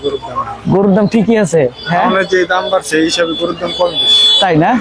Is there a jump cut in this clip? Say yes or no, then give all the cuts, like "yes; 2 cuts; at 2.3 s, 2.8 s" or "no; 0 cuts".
no; 0 cuts